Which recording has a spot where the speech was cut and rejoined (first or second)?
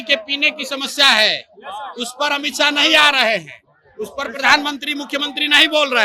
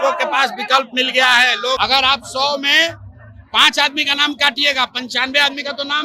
second